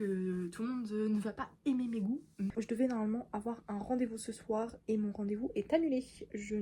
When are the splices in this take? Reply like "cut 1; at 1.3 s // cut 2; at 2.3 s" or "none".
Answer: cut 1; at 2.5 s